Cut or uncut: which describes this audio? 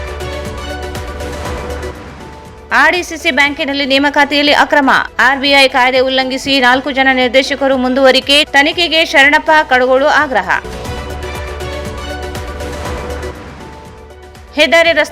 cut